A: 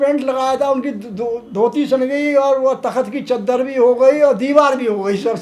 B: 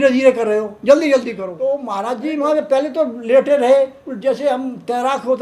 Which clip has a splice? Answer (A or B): B